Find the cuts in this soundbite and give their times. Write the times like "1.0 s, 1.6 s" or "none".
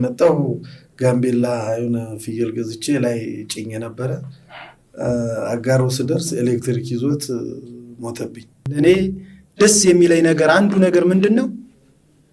8.6 s